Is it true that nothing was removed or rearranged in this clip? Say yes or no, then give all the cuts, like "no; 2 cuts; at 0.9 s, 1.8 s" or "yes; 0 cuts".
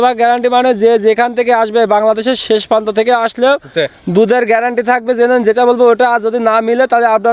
yes; 0 cuts